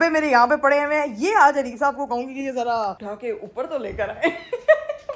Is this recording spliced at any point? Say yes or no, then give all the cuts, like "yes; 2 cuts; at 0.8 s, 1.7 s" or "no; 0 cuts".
no; 0 cuts